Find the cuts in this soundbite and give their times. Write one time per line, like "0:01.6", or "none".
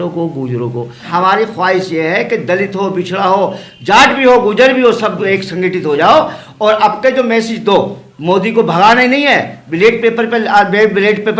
0:01.1

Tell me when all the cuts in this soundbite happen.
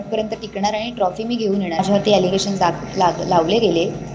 0:01.8

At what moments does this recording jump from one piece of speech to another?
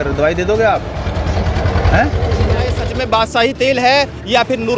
0:02.8

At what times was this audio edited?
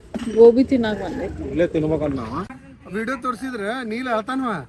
0:02.5

